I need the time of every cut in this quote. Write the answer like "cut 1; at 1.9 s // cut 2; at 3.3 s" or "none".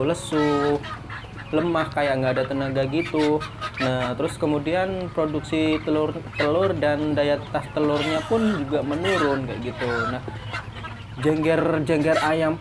none